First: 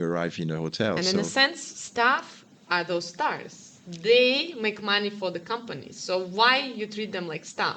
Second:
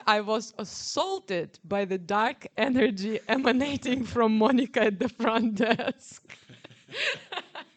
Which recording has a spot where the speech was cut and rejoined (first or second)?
first